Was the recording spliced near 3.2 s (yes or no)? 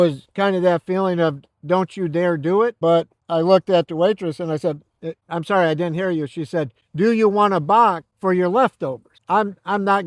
no